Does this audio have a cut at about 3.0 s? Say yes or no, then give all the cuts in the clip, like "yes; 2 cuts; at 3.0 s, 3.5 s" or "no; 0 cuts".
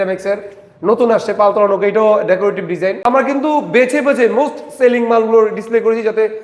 yes; 1 cut; at 3.0 s